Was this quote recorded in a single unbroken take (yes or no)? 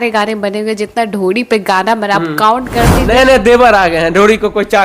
no